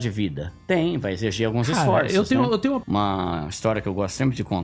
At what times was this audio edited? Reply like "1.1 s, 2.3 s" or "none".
none

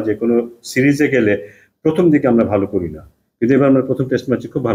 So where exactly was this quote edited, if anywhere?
none

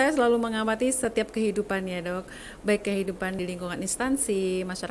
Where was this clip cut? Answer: 3.4 s

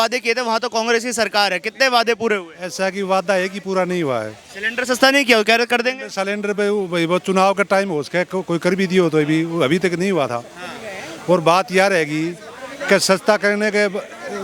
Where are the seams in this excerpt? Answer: none

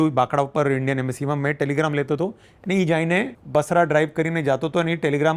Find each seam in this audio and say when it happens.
3.4 s

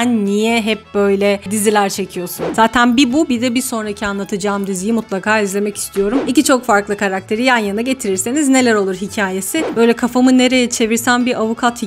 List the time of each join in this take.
2.5 s, 6.2 s, 9.6 s

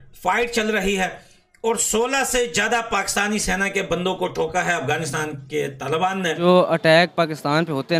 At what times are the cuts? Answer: 6.4 s

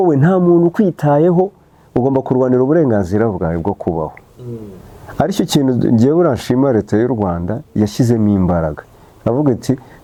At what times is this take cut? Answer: none

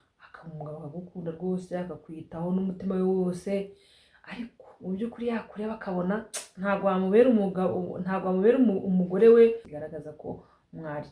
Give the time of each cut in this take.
9.6 s

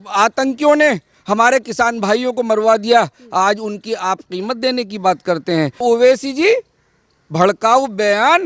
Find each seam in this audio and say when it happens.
5.8 s

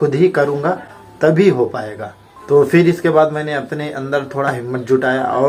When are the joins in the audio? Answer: none

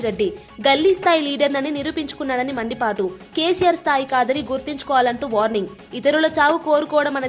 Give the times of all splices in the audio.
none

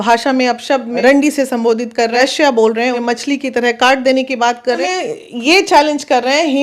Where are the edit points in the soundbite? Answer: 1.0 s, 2.1 s, 3.0 s, 4.8 s

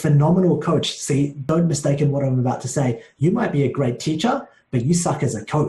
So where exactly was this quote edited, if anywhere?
1.4 s

